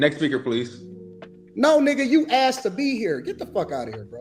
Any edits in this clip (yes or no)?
no